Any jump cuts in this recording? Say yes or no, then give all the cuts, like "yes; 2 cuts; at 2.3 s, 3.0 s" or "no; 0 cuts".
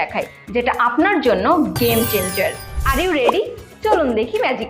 yes; 1 cut; at 2.2 s